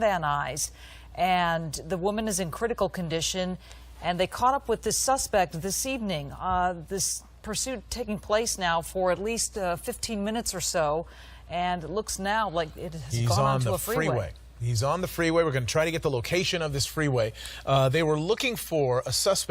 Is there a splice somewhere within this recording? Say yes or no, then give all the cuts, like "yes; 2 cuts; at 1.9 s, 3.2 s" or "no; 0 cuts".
yes; 1 cut; at 9.8 s